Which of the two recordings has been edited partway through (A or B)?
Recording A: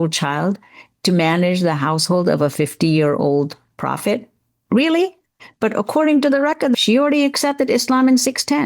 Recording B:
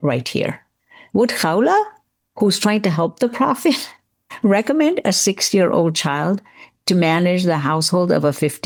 A